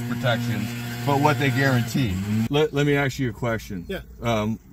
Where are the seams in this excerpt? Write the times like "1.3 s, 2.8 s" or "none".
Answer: 2.5 s